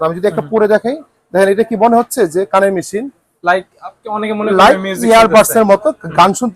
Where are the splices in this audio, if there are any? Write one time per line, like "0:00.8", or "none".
none